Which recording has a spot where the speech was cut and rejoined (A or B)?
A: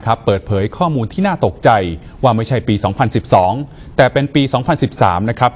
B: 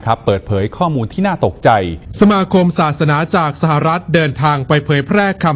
B